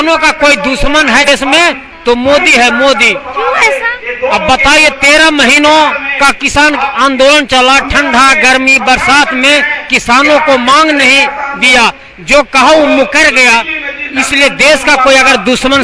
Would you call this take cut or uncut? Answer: cut